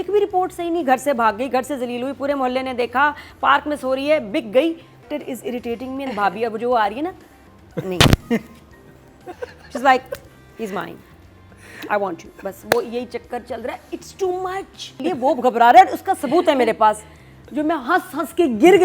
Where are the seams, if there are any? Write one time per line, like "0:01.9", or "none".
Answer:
0:05.1
0:09.4
0:14.9